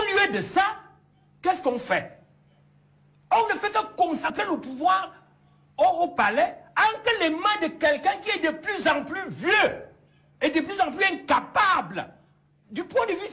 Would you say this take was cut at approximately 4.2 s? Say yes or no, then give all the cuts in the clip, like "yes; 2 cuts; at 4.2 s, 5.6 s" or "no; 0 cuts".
yes; 1 cut; at 4.2 s